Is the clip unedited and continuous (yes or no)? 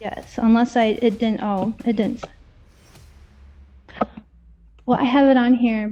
yes